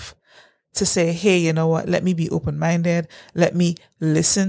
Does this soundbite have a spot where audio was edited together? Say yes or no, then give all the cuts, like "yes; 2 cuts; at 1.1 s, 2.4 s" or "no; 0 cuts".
no; 0 cuts